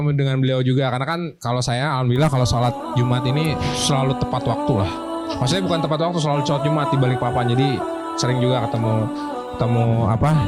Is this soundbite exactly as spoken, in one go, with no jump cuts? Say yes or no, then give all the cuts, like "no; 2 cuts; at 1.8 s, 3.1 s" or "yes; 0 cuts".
yes; 0 cuts